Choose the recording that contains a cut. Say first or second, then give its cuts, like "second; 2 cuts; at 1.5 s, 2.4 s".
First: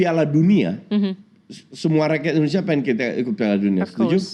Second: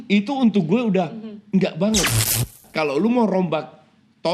second; 1 cut; at 2.6 s